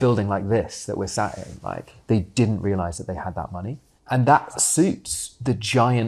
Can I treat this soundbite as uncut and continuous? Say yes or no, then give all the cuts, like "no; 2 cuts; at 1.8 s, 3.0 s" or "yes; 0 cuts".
no; 1 cut; at 1.9 s